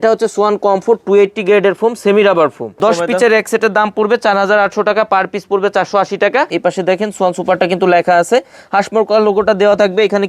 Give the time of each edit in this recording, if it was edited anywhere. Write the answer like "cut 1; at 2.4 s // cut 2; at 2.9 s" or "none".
cut 1; at 2.7 s // cut 2; at 6.5 s